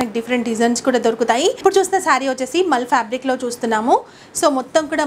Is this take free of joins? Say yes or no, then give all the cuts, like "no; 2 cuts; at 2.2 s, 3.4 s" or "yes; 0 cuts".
no; 1 cut; at 1.6 s